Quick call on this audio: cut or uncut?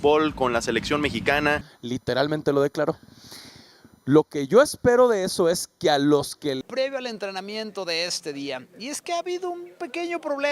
cut